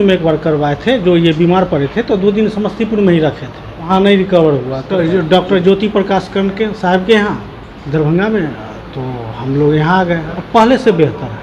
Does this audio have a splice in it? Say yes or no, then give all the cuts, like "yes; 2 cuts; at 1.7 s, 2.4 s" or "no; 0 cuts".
yes; 3 cuts; at 3.9 s, 4.9 s, 10.3 s